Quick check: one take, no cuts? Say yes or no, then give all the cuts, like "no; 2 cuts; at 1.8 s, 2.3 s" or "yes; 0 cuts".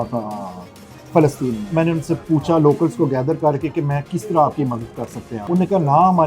no; 2 cuts; at 1.7 s, 5.3 s